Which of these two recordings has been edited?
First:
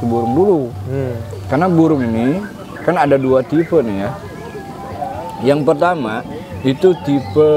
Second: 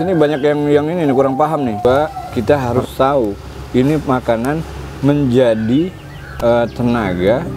second; 1 cut; at 1.8 s

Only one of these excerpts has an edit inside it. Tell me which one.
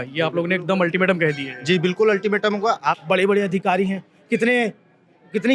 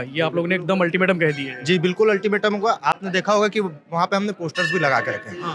first; 1 cut; at 3.0 s

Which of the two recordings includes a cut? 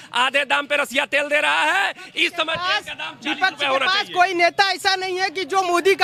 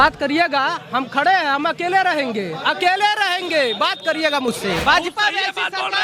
second; 1 cut; at 4.8 s

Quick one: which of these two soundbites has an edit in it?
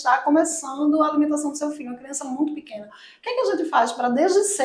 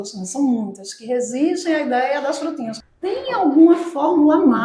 second; 1 cut; at 2.8 s

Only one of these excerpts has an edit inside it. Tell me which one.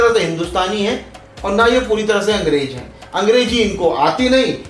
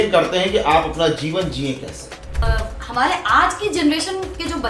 second; 1 cut; at 2.4 s

